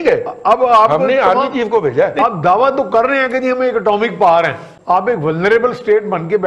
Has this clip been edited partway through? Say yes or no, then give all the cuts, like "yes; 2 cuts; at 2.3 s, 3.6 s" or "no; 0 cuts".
yes; 2 cuts; at 2.2 s, 4.7 s